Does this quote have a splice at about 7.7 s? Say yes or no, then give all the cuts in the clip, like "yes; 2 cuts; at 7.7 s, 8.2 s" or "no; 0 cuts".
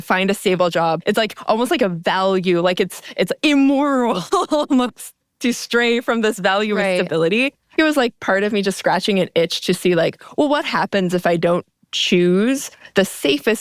yes; 2 cuts; at 1.0 s, 7.7 s